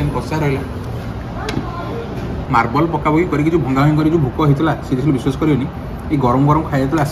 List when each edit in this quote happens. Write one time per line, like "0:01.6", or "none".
0:00.8
0:02.4